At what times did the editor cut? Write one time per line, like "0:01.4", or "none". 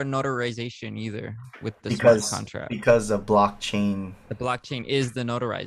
none